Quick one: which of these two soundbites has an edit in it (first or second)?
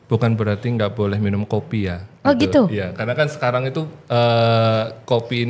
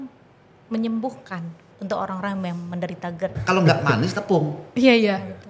second